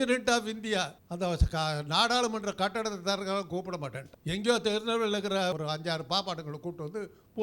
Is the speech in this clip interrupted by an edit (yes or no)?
yes